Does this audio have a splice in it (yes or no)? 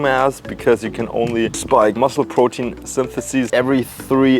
yes